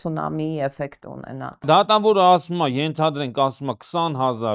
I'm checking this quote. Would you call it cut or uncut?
cut